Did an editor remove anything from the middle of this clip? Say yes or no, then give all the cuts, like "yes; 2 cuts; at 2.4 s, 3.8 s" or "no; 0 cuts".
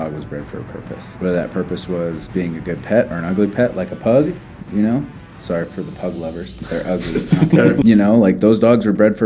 yes; 2 cuts; at 1.1 s, 7.8 s